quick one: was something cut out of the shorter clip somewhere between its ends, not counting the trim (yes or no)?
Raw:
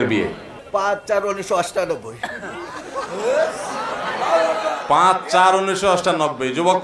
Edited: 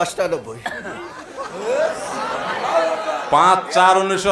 no